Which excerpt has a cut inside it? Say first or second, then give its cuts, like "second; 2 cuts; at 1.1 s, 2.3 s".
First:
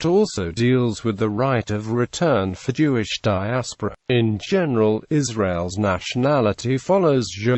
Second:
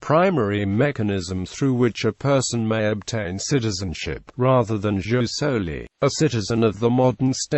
second; 1 cut; at 2.2 s